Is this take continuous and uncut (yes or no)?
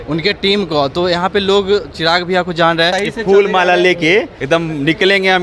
no